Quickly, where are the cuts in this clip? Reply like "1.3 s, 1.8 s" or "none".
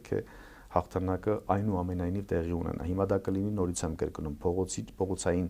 none

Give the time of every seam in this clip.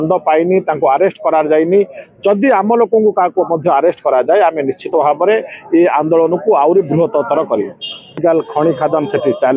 8.2 s

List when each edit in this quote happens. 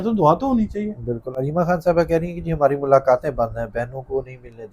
none

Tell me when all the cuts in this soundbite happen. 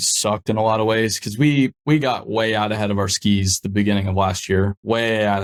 none

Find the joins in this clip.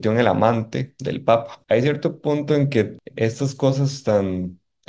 1.5 s, 3.0 s

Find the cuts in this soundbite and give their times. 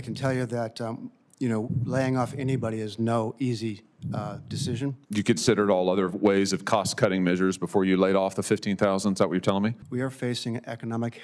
5.0 s, 9.8 s

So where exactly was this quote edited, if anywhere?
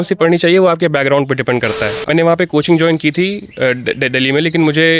2.0 s

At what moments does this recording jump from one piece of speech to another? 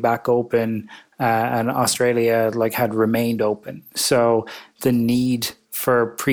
none

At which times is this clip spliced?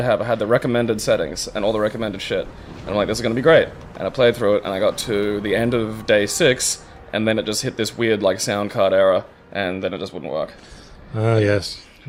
none

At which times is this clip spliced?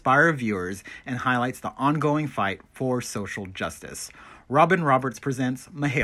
none

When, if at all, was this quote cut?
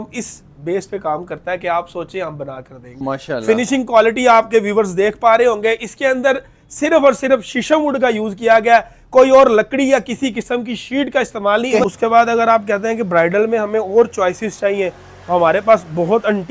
3.0 s, 11.8 s

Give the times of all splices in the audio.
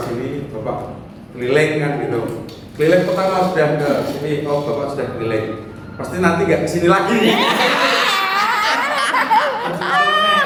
none

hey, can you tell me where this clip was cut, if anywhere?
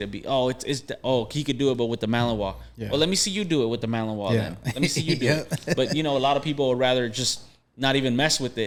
none

